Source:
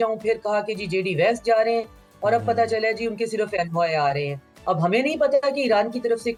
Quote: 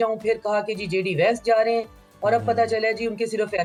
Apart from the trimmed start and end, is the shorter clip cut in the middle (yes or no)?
no